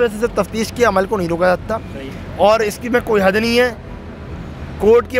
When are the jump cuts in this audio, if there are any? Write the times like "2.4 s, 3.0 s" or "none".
none